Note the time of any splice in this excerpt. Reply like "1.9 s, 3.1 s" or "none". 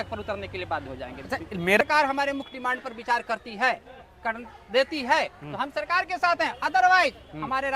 1.8 s